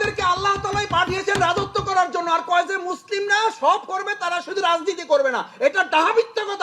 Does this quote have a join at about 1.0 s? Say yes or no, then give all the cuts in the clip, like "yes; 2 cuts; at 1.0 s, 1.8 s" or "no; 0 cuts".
no; 0 cuts